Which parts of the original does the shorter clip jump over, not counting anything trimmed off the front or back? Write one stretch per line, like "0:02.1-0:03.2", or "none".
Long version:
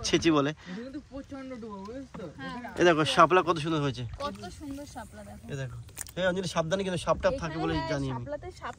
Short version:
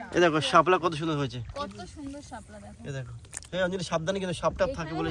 none